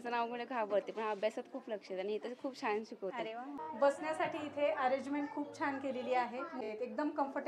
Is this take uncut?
no; 2 cuts; at 3.6 s, 6.6 s

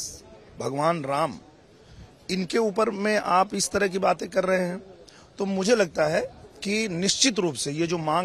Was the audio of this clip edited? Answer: no; 0 cuts

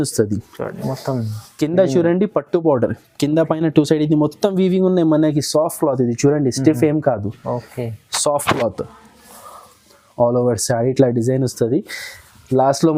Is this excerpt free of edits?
yes; 0 cuts

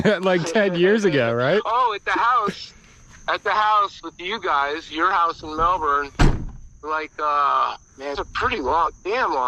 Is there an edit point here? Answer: no; 0 cuts

